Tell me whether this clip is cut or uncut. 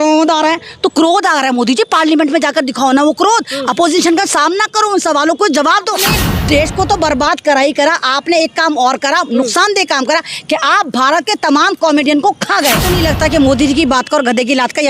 cut